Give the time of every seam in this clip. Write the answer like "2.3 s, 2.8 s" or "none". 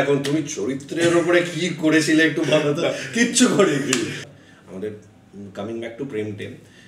4.1 s